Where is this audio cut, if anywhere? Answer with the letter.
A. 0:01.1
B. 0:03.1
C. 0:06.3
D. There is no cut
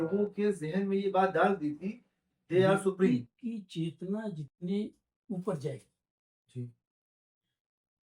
B